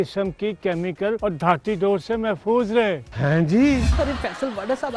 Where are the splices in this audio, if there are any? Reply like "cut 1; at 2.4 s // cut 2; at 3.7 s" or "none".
cut 1; at 3.9 s

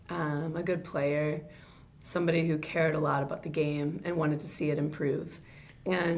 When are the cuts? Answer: none

